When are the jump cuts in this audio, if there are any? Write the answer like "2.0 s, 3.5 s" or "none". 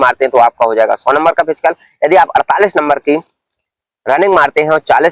none